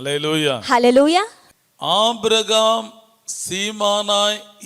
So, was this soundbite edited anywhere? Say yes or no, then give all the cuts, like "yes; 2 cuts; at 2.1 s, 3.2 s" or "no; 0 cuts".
yes; 1 cut; at 1.4 s